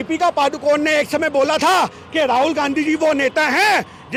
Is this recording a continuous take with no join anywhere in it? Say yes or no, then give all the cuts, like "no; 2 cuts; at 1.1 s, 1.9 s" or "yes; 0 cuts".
yes; 0 cuts